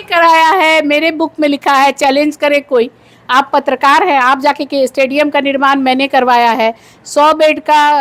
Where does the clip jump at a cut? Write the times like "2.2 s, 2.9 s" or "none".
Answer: none